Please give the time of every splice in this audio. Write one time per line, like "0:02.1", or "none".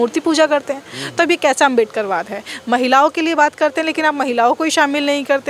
none